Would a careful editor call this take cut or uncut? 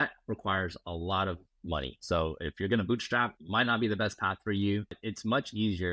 cut